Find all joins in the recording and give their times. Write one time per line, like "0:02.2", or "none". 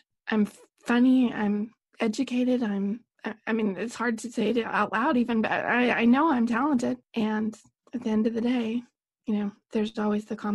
0:07.0